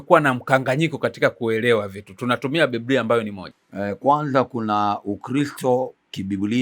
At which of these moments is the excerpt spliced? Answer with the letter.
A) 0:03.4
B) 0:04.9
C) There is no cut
A